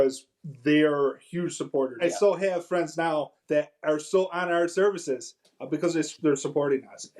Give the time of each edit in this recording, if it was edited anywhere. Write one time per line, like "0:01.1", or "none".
0:01.9
0:03.4